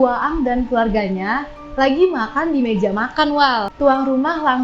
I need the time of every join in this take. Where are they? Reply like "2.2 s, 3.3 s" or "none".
3.7 s